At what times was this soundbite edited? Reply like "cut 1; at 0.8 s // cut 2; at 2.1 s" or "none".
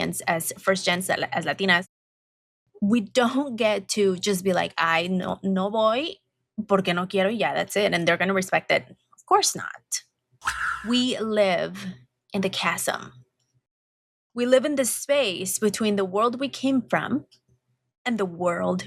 cut 1; at 10.5 s